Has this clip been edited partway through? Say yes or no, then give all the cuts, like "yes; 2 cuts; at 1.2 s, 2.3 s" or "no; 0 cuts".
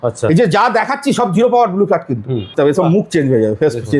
yes; 1 cut; at 2.5 s